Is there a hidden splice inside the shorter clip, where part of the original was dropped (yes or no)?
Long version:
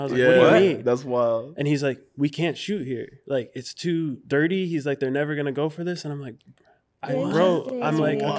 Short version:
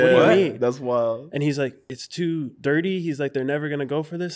yes